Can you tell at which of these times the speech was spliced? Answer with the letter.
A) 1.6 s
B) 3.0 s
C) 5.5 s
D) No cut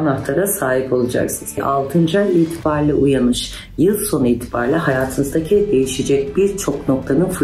A